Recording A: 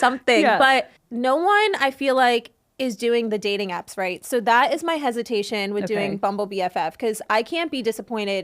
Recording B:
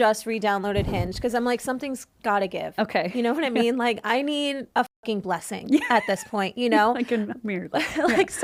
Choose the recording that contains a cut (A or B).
A